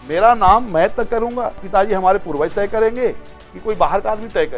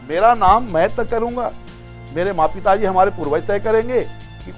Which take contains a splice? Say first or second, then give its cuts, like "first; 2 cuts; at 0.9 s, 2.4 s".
first; 1 cut; at 1.6 s